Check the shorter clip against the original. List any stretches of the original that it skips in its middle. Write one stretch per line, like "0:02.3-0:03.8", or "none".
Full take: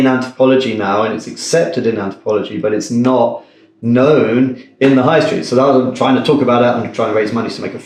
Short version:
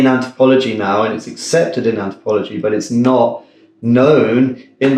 none